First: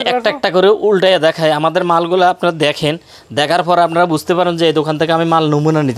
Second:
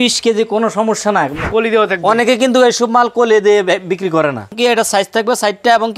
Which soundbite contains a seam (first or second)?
second